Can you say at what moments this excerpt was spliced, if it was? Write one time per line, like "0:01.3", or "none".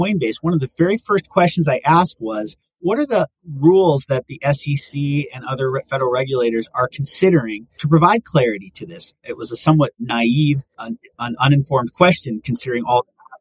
none